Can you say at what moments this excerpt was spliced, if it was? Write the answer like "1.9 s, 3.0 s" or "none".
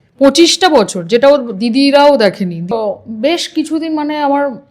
2.7 s